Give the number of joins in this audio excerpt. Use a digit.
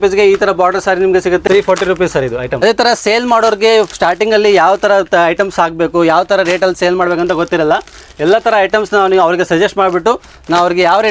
2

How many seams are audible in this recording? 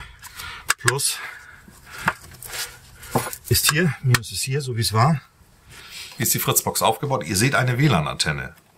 1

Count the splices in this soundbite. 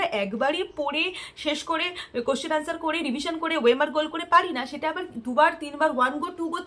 0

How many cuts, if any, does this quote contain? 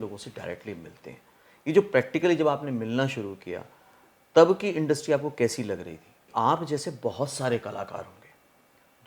1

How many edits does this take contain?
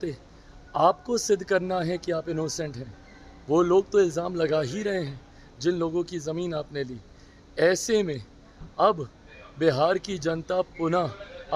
0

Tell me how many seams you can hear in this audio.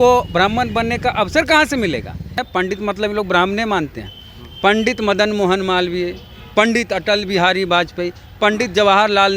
1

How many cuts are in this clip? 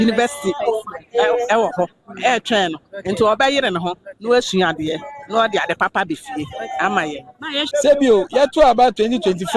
1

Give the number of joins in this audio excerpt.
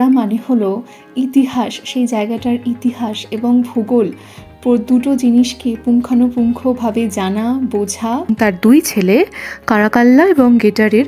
1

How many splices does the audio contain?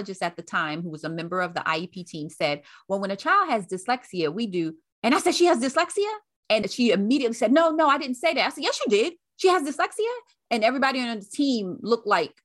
2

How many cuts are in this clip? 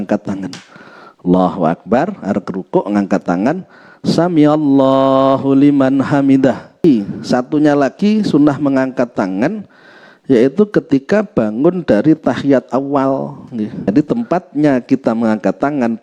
2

